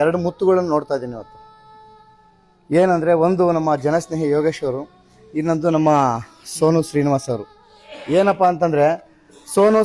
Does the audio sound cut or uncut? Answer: uncut